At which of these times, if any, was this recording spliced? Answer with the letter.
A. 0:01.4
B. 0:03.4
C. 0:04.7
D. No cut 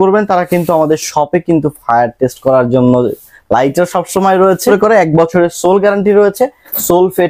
C